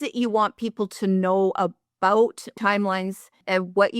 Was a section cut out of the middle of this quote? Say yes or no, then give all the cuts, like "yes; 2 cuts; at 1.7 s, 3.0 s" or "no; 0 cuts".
yes; 1 cut; at 2.9 s